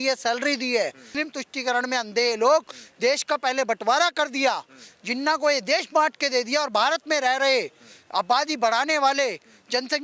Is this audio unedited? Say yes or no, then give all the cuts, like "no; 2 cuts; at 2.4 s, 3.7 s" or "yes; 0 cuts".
no; 1 cut; at 1.2 s